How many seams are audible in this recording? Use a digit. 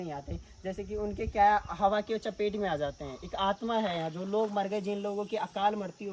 0